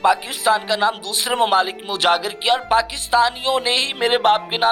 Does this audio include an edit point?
no; 0 cuts

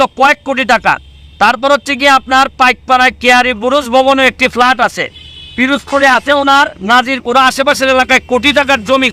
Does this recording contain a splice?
no; 0 cuts

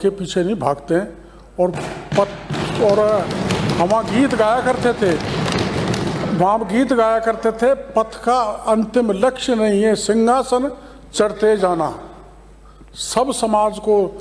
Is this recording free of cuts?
yes; 0 cuts

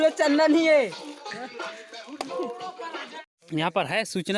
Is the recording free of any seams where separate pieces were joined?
no; 1 cut; at 3.2 s

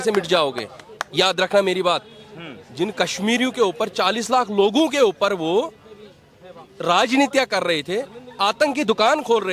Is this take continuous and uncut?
yes; 0 cuts

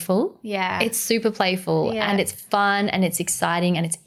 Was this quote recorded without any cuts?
yes; 0 cuts

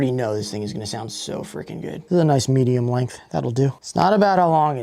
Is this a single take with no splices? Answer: no; 2 cuts; at 2.0 s, 3.8 s

